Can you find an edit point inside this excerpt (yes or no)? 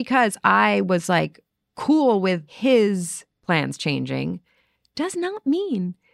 yes